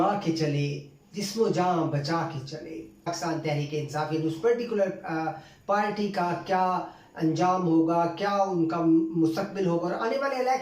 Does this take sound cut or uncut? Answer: cut